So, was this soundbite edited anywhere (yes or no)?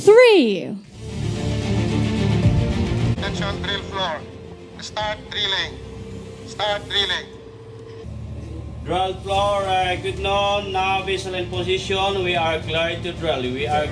yes